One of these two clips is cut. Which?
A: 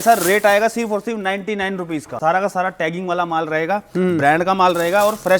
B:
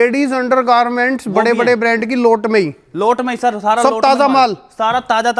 A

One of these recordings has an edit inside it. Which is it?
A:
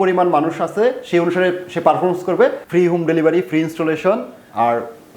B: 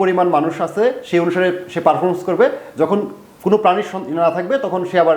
A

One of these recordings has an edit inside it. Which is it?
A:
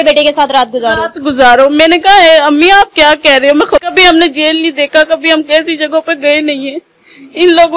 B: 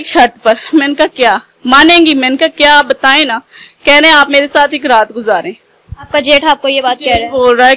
A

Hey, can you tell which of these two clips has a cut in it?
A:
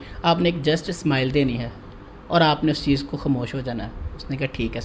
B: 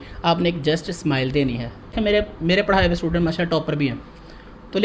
B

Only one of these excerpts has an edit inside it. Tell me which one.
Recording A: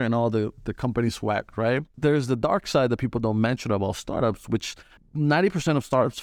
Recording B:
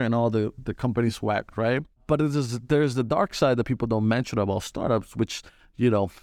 A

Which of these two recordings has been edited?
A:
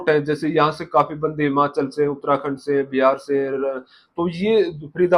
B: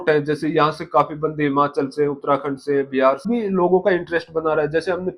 B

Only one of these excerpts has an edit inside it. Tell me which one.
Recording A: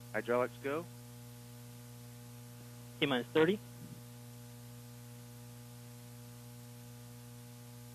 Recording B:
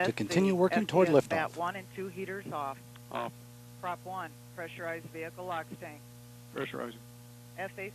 B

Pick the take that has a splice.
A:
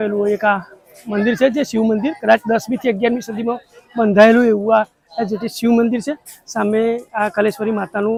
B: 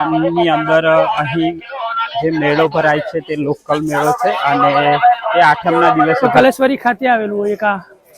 B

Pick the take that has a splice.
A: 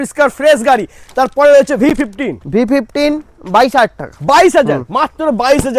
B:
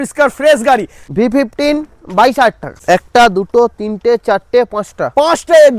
B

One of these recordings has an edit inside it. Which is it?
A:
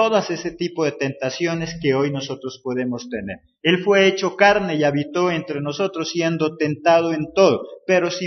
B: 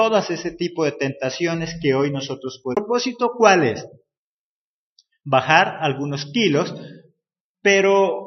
A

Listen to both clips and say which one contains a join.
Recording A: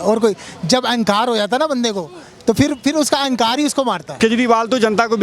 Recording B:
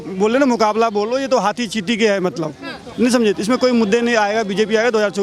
A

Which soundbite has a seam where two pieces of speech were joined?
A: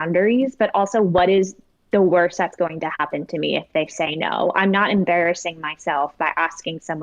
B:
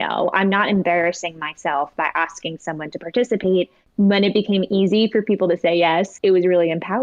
B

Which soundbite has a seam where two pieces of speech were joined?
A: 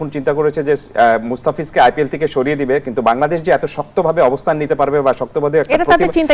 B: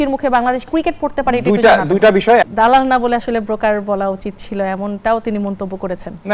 B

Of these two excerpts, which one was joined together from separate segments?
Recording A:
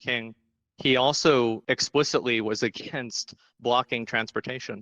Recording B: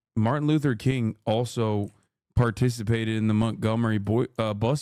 A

